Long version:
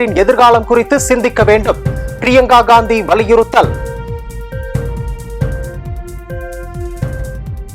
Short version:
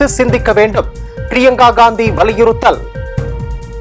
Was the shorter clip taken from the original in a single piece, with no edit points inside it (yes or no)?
no